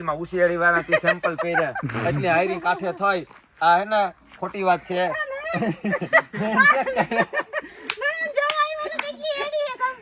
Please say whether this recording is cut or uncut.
uncut